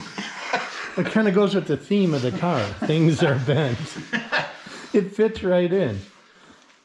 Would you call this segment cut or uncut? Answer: uncut